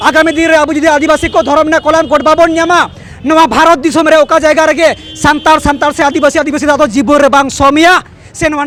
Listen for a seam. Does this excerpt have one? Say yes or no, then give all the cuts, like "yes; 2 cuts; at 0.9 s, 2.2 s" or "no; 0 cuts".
no; 0 cuts